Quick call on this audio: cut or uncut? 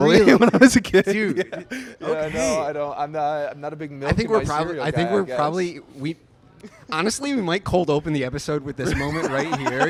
uncut